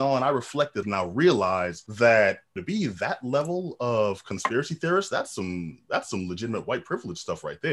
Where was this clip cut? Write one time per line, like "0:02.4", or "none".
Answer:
0:00.8
0:01.8
0:02.5